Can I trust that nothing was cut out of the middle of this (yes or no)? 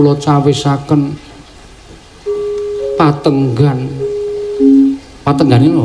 yes